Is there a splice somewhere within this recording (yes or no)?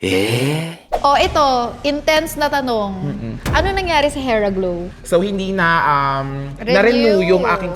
yes